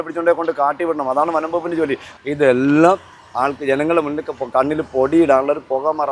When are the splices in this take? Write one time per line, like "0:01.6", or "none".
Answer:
0:02.0